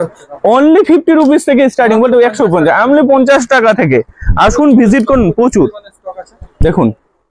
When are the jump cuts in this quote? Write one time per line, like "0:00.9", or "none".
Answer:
none